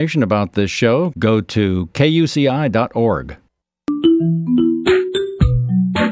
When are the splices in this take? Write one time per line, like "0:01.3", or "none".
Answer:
0:03.9